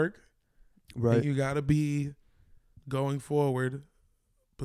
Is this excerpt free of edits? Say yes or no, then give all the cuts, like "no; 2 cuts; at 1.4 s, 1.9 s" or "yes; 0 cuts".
yes; 0 cuts